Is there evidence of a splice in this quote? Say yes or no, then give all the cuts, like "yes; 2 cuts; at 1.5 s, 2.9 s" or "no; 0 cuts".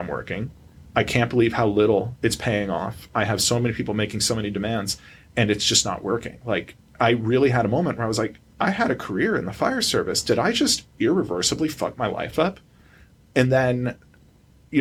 no; 0 cuts